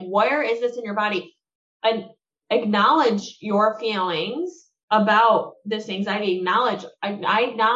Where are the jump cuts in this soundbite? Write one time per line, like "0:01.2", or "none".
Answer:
none